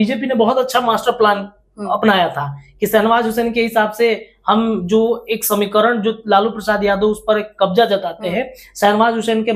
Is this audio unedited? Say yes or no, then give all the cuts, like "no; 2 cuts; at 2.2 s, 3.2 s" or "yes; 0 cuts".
yes; 0 cuts